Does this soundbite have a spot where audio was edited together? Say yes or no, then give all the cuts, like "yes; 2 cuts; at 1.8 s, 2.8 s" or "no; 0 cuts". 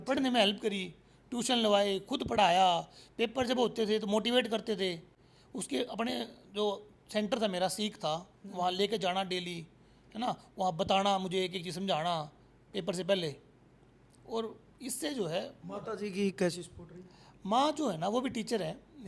no; 0 cuts